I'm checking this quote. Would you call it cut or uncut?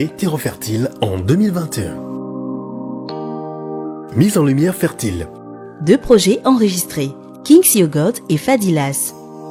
uncut